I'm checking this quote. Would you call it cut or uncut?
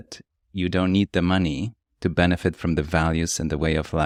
uncut